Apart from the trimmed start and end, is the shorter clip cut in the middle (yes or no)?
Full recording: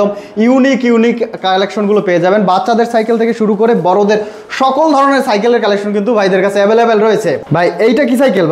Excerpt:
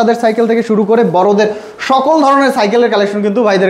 no